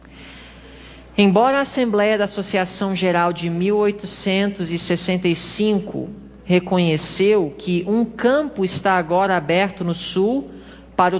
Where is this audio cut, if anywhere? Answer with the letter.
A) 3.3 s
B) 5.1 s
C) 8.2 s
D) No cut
C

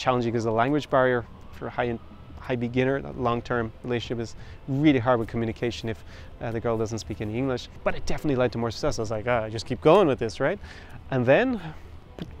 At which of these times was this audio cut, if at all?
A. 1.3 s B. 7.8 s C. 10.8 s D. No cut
B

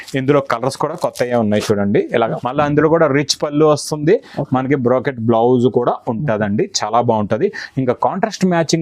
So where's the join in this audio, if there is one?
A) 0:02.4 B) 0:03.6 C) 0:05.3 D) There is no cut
A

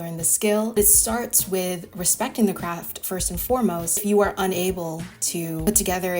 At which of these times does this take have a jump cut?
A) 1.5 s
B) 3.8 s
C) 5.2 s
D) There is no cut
D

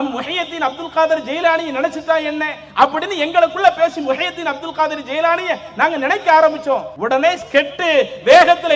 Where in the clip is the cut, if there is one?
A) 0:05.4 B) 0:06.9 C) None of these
B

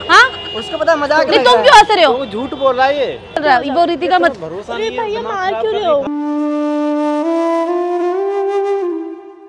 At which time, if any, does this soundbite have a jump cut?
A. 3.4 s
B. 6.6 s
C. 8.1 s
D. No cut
A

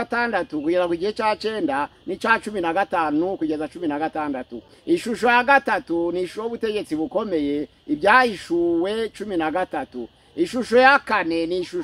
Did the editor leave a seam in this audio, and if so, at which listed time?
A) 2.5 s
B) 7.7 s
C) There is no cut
C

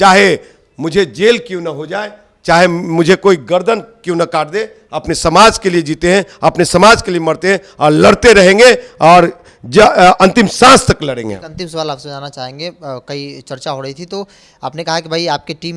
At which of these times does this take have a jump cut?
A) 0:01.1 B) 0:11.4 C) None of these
C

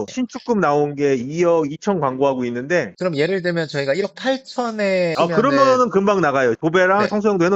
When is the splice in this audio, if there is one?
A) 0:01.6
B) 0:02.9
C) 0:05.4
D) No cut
B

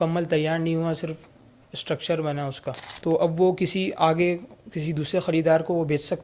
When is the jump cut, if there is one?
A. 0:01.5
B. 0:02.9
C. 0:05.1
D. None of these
B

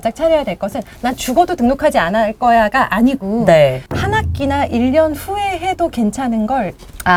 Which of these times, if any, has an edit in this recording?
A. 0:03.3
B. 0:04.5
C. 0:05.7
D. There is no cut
D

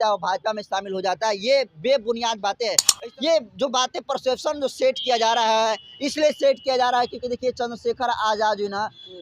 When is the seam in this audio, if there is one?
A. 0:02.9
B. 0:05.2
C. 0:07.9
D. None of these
A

